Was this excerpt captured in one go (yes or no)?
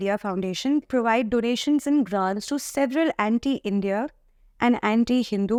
yes